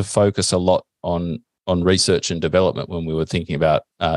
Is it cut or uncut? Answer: uncut